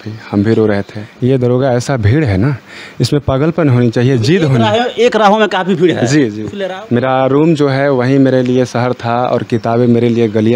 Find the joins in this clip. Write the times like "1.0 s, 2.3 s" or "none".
1.0 s, 6.5 s